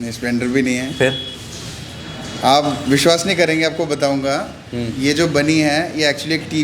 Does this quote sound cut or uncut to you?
uncut